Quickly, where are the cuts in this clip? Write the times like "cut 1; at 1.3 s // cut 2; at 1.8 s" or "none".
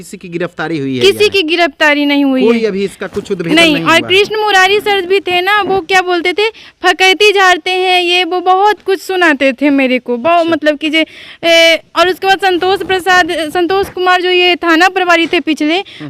none